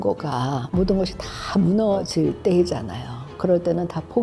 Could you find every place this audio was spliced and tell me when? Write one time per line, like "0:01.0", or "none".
0:02.0